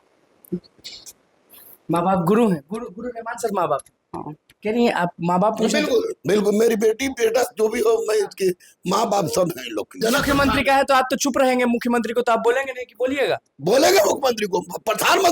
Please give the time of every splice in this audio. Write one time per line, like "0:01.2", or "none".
0:10.0